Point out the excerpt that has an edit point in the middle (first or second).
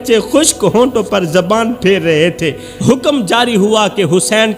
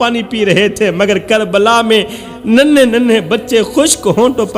first